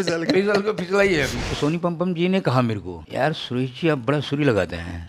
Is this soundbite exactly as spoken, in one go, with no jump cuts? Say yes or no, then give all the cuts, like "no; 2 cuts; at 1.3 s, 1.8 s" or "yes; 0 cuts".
no; 2 cuts; at 1.4 s, 3.0 s